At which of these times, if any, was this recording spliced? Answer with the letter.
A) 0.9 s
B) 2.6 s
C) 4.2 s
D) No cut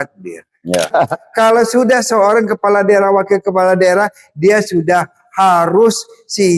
A